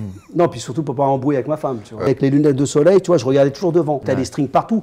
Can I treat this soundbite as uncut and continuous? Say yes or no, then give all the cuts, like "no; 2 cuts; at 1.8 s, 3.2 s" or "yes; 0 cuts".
no; 2 cuts; at 2.1 s, 4.0 s